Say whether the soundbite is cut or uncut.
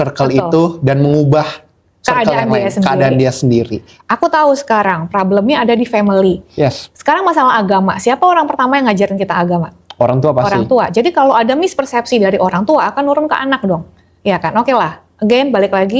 cut